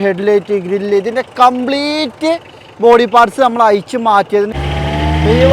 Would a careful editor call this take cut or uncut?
cut